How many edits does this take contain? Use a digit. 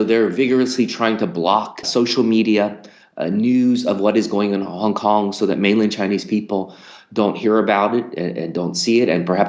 1